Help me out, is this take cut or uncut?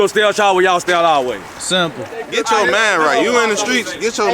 cut